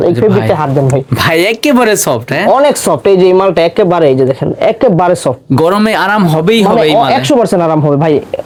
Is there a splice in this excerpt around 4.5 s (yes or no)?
no